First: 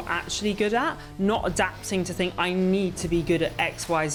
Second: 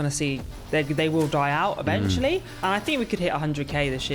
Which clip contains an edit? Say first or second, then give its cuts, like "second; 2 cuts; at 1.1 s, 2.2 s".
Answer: second; 1 cut; at 2.5 s